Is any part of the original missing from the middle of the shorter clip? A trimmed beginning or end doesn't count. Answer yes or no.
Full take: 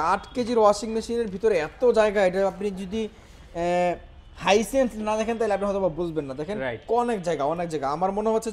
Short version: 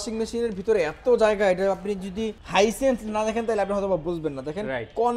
yes